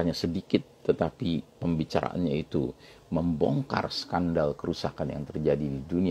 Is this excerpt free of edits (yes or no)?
yes